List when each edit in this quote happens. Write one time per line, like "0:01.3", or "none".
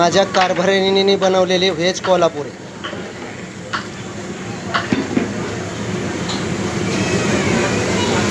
none